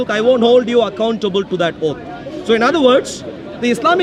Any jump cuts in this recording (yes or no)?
no